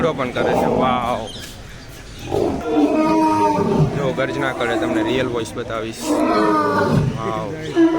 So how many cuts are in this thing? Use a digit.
1